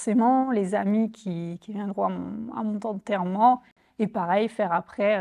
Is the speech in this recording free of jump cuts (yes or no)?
yes